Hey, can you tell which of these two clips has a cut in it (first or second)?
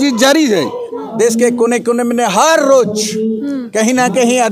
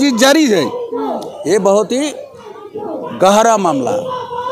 first